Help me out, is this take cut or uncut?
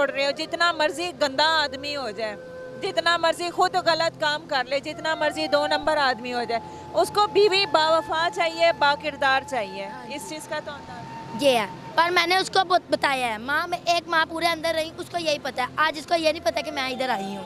uncut